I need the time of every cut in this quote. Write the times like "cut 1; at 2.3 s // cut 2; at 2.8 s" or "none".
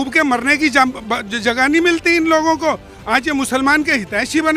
none